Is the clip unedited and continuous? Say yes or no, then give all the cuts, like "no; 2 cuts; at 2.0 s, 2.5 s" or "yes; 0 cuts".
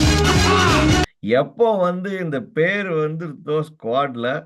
yes; 0 cuts